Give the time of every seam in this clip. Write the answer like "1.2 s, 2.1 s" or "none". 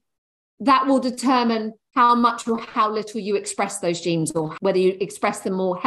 1.8 s, 4.5 s